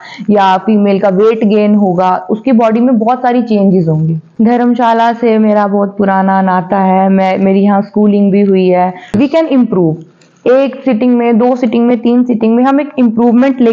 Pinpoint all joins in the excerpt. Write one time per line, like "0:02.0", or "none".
0:04.2
0:09.1